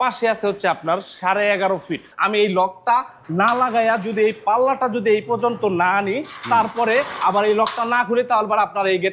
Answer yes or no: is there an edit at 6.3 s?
no